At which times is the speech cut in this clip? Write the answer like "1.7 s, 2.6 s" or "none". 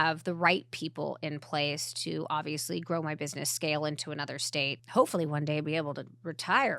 4.8 s